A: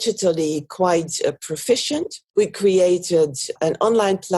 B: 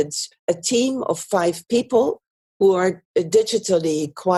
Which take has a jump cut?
A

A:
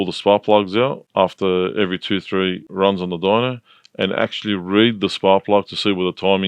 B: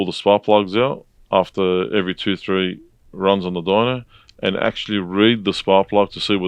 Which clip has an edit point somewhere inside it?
A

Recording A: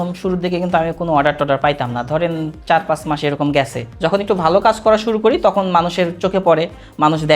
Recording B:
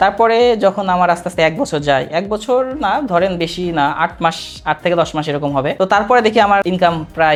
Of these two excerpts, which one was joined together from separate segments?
A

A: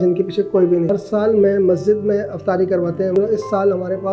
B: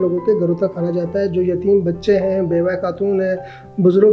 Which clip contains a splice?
A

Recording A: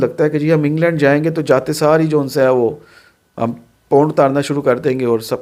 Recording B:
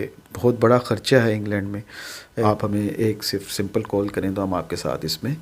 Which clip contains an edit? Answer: B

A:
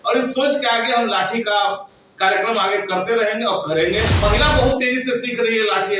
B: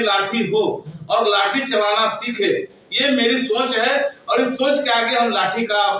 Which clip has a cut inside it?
A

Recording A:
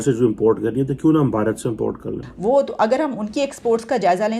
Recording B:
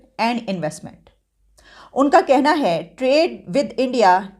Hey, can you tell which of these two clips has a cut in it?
A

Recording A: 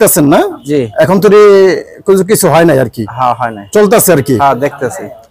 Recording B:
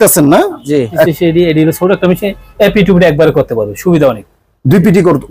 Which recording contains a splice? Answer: B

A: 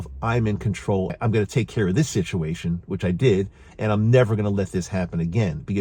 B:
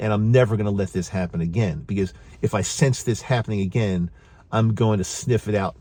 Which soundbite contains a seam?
A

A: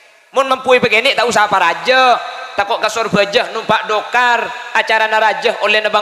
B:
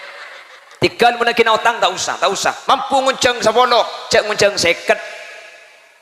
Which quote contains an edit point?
B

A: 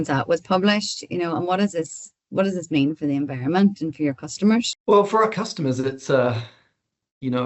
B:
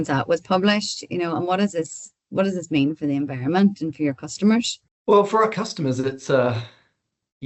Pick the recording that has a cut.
A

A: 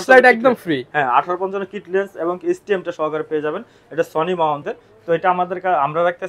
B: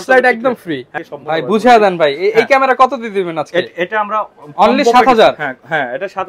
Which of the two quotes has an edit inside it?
B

